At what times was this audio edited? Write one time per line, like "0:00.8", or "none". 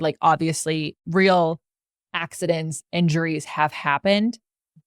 0:01.0